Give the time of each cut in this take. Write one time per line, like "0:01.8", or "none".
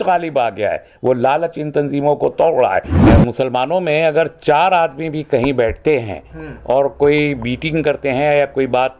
0:02.9